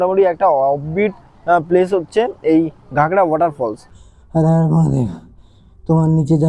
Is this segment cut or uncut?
cut